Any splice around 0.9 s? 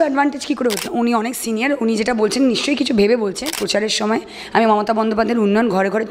yes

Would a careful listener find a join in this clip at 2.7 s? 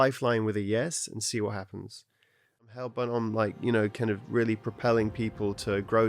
yes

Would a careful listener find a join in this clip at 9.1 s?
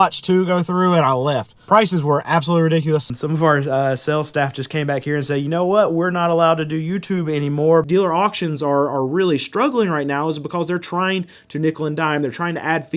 no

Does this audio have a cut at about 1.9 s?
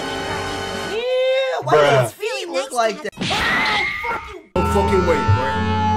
no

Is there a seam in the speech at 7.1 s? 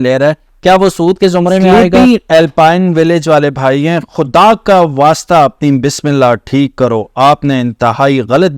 no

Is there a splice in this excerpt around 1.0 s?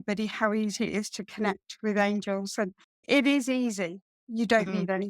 no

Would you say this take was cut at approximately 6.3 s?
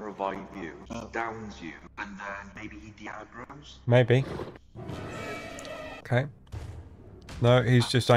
no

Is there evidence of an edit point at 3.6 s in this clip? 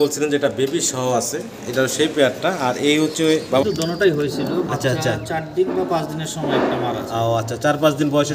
yes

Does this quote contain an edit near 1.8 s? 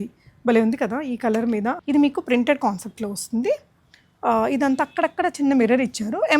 yes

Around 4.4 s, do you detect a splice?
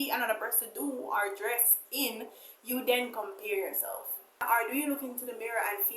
yes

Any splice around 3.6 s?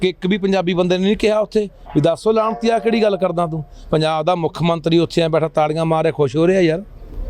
no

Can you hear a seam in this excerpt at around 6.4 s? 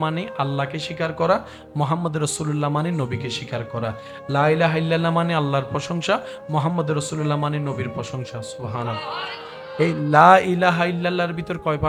no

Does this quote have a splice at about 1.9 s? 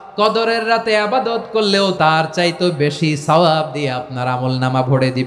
yes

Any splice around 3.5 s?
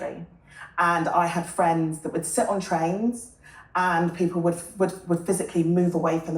no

